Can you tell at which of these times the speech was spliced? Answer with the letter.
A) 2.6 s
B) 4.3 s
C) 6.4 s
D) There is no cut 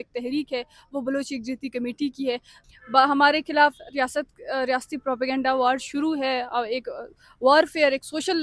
A